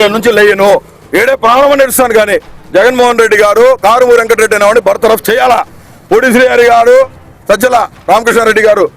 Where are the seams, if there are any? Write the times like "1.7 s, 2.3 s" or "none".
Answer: 1.0 s